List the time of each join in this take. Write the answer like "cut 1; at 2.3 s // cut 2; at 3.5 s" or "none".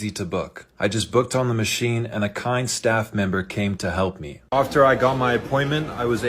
cut 1; at 4.3 s